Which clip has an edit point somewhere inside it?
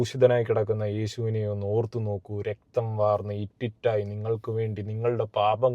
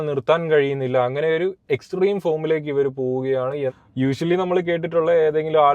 second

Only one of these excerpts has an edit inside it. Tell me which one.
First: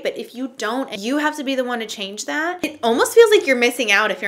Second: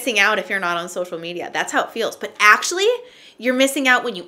first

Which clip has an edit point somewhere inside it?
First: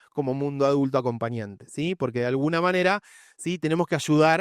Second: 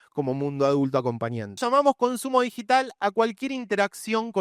second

